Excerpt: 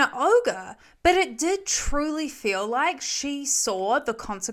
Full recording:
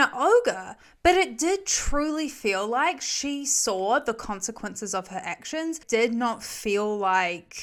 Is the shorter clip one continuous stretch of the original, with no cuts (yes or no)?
yes